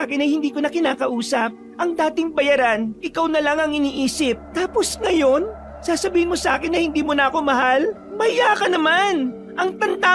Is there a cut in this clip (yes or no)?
yes